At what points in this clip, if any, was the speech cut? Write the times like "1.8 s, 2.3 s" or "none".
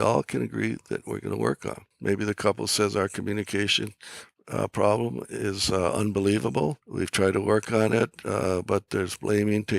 1.9 s, 6.8 s